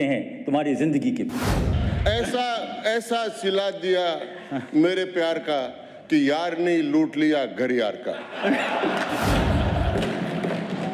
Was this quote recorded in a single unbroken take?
no; 1 cut; at 1.7 s

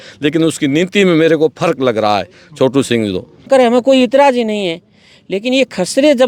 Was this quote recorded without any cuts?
no; 1 cut; at 3.4 s

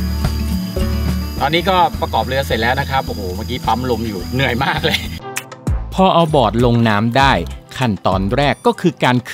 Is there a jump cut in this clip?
yes; 1 cut; at 5.2 s

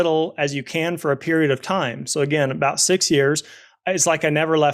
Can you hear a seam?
no; 0 cuts

